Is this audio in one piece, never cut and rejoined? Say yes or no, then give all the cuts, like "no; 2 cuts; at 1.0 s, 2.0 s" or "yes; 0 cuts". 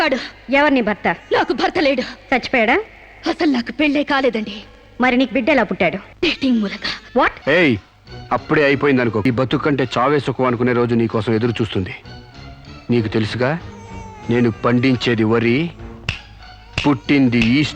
no; 3 cuts; at 6.1 s, 7.4 s, 9.2 s